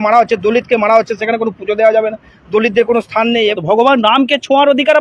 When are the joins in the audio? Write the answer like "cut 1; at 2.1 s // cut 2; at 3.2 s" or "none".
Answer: cut 1; at 3.6 s